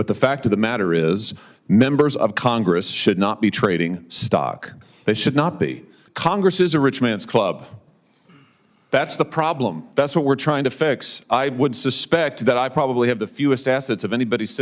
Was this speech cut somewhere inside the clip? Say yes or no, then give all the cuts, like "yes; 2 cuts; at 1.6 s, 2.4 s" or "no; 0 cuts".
yes; 1 cut; at 6.0 s